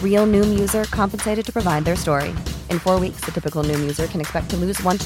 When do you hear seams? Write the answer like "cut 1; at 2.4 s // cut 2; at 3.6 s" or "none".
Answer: none